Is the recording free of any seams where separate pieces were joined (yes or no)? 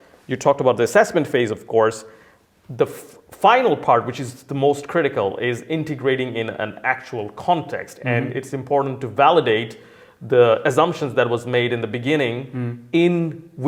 yes